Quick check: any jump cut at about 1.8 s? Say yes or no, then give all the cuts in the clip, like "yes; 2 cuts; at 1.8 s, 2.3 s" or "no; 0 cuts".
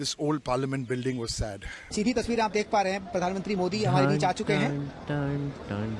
yes; 1 cut; at 1.8 s